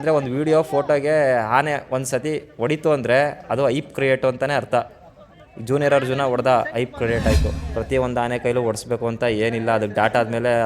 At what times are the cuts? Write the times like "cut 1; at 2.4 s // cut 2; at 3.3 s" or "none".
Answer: cut 1; at 7.6 s

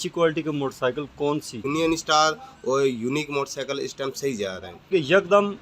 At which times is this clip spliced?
cut 1; at 1.7 s // cut 2; at 4.9 s

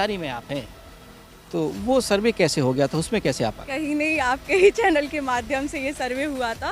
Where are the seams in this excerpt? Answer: none

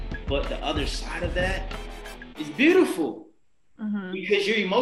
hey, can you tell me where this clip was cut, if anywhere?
none

